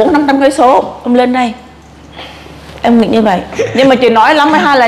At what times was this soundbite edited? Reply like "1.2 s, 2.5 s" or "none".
3.6 s